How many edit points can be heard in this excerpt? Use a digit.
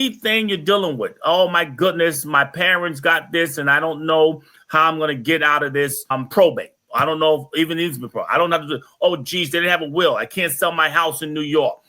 1